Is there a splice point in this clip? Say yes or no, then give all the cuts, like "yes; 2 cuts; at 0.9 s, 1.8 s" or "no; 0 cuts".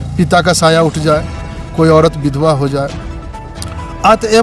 no; 0 cuts